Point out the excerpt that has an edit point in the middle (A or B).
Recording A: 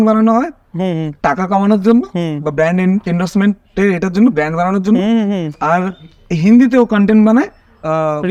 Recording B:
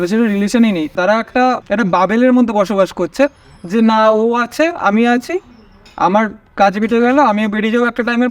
B